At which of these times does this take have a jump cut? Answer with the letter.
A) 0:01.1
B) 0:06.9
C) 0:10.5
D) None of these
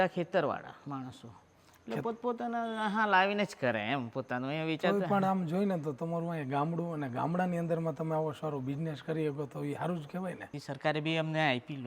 C